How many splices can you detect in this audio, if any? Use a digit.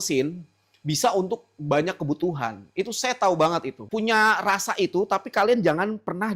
1